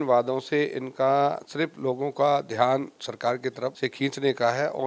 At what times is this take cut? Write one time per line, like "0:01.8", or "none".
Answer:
0:03.8